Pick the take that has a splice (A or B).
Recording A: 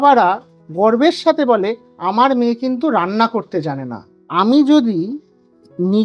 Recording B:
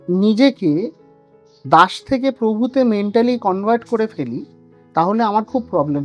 A